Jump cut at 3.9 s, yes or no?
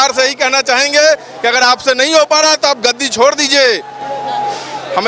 no